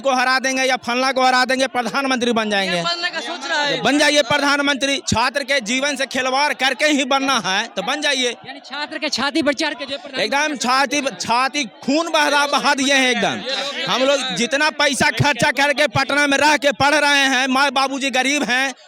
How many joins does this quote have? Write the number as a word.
zero